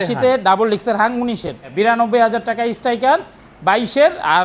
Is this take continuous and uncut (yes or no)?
no